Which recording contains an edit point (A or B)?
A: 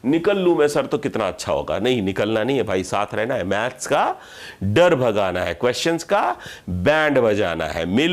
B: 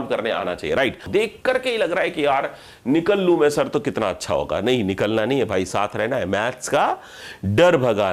B